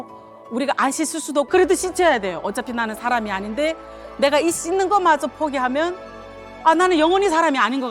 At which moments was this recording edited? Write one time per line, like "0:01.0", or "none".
0:01.5

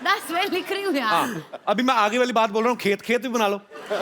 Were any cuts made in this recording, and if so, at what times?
none

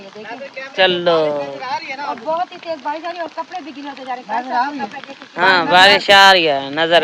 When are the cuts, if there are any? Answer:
none

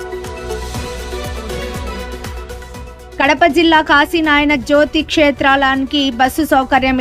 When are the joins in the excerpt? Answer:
0:03.0

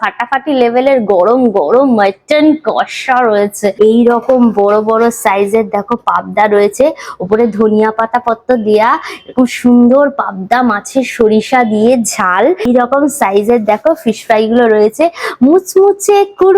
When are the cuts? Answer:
0:03.7
0:12.7

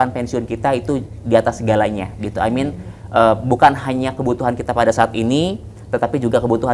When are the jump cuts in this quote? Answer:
none

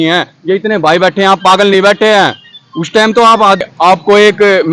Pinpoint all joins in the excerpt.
0:03.6

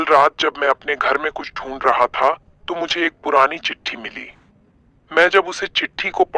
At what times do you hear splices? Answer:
none

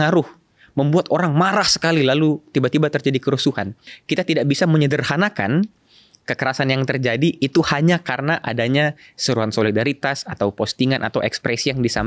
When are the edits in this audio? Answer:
0:03.9

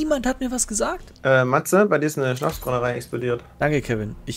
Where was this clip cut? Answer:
0:01.1

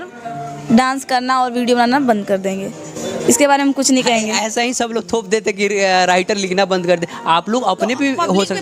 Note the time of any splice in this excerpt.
none

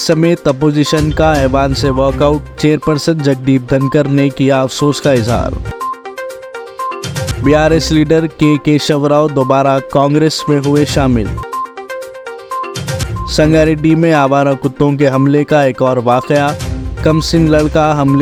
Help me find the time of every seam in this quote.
none

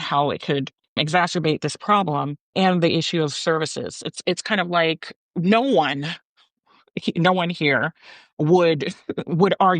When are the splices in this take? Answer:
0:01.0
0:02.5
0:05.1

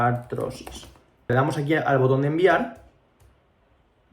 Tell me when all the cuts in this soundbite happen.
0:01.3

